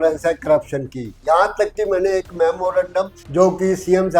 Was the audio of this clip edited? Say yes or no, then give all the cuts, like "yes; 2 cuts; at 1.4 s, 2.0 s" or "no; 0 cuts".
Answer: yes; 2 cuts; at 1.1 s, 3.2 s